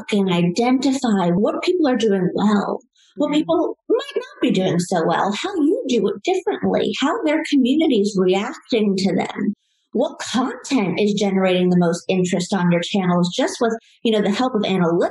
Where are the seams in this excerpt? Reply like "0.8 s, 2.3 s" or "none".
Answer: 1.4 s